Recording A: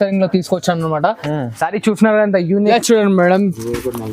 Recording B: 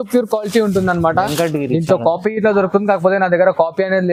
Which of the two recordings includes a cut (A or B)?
A